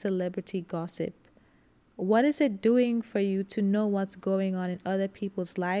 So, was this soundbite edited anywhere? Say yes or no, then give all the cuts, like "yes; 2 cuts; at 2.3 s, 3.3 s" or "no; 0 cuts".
no; 0 cuts